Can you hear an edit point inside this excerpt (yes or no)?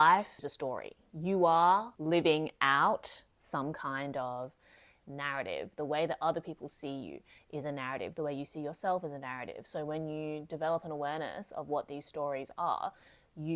no